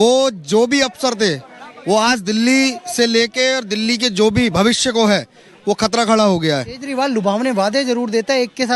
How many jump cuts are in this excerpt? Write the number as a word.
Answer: one